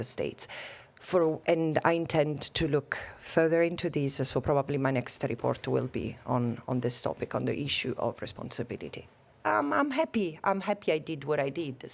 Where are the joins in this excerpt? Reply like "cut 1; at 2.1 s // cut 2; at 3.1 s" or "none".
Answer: cut 1; at 9.4 s